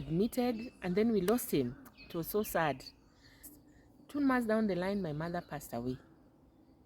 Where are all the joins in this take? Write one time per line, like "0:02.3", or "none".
0:03.5